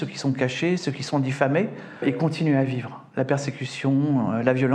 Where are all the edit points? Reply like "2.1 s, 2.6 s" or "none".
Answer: 2.0 s